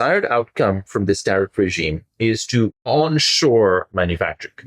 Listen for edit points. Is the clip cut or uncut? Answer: cut